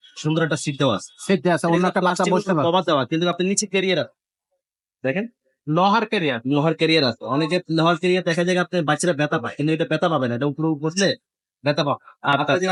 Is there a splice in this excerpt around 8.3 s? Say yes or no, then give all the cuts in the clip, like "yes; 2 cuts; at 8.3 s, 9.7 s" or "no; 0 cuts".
no; 0 cuts